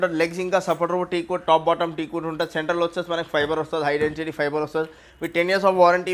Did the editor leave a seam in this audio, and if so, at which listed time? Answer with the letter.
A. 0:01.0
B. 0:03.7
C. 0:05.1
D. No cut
D